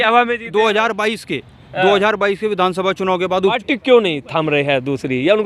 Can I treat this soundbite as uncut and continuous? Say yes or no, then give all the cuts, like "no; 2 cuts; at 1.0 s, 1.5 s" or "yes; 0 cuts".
no; 1 cut; at 3.6 s